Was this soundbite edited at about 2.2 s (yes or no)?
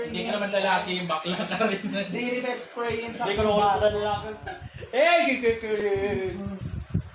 yes